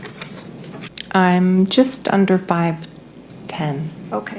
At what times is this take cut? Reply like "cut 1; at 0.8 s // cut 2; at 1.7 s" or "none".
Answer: cut 1; at 0.9 s